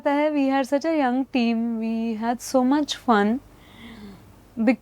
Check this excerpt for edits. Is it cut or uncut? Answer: uncut